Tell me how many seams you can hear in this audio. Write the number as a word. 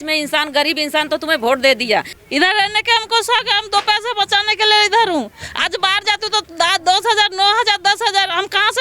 one